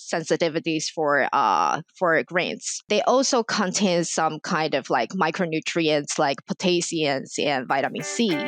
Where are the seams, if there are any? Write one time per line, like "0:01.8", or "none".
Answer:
0:02.8